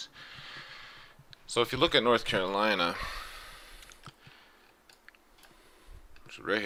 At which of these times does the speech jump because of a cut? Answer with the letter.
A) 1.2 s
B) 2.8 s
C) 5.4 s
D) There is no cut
D